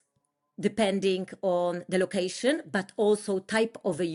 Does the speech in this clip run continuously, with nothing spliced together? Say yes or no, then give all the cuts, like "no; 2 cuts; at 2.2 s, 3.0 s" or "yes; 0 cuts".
yes; 0 cuts